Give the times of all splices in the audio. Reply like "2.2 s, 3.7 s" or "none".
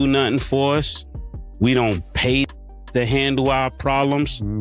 none